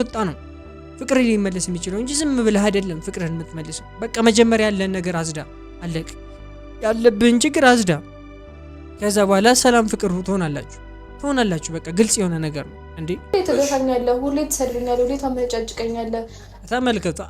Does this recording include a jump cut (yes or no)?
yes